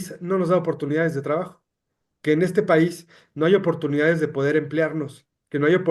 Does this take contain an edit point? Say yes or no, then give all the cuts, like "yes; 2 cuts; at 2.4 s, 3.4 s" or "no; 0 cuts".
no; 0 cuts